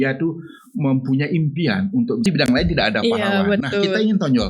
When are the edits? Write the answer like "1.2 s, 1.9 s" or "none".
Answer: 2.2 s